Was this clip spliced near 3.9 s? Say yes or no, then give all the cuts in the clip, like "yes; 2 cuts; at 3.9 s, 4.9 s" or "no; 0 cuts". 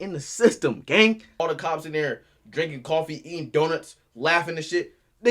no; 1 cut; at 1.4 s